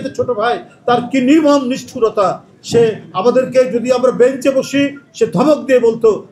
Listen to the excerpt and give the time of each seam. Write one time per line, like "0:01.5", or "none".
none